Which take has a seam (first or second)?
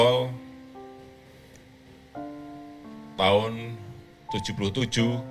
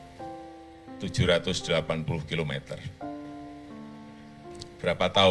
second